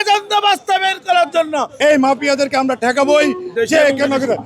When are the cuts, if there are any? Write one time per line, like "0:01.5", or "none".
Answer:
0:01.7